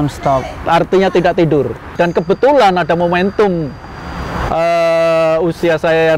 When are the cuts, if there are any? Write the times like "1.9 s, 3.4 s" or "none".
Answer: 1.9 s